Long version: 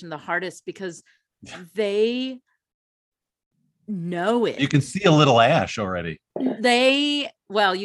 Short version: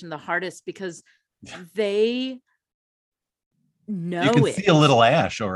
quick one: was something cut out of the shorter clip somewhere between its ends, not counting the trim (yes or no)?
yes